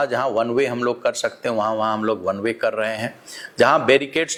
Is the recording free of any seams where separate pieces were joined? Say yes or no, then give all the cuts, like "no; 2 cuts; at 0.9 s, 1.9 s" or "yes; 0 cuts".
yes; 0 cuts